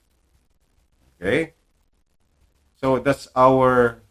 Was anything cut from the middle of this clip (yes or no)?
no